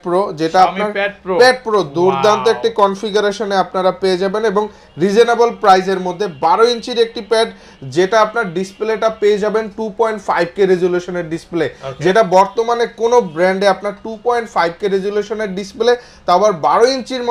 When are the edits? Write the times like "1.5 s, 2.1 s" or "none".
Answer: none